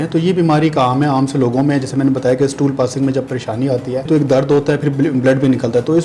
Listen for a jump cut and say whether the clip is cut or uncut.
cut